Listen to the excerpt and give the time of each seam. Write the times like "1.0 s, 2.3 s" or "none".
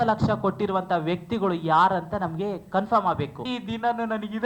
3.5 s

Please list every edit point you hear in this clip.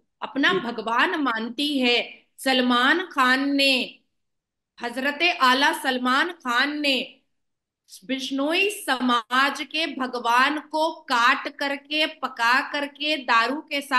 none

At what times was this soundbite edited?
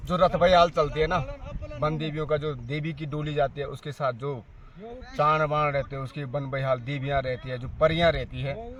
none

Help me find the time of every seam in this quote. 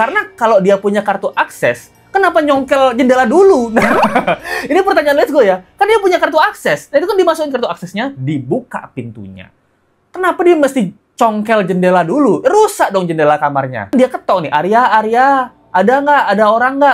none

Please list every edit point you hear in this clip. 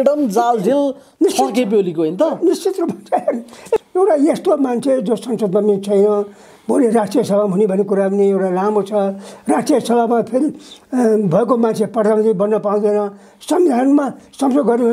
3.8 s

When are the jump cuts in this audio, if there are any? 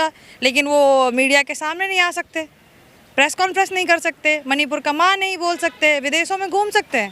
none

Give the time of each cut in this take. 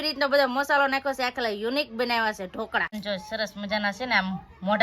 3.0 s

